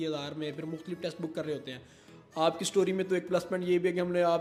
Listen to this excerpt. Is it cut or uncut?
uncut